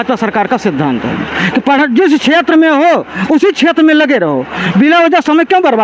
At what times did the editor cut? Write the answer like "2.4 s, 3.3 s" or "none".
none